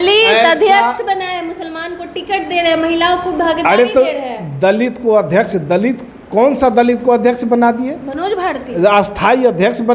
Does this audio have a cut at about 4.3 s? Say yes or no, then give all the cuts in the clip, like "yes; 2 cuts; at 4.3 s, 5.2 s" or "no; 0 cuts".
no; 0 cuts